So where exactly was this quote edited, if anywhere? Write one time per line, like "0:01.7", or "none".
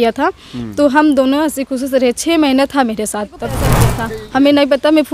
0:03.9